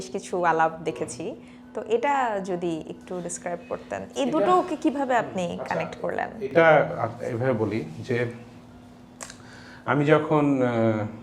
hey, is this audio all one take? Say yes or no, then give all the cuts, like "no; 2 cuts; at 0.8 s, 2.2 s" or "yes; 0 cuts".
yes; 0 cuts